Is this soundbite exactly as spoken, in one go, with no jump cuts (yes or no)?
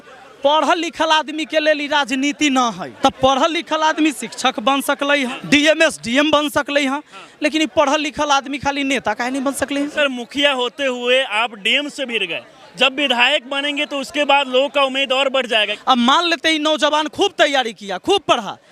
no